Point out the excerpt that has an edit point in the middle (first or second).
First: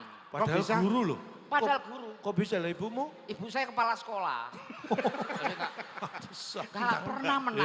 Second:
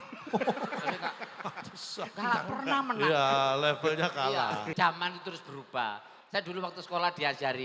second